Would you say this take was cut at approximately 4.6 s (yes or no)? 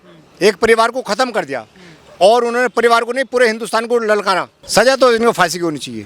yes